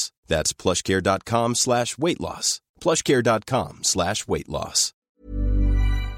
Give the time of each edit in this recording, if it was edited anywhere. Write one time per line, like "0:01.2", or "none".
0:05.0